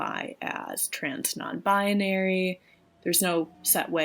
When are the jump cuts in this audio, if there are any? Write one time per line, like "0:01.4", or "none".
0:02.9